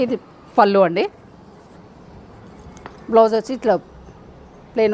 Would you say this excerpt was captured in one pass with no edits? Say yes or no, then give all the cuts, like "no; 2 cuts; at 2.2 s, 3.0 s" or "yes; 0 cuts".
yes; 0 cuts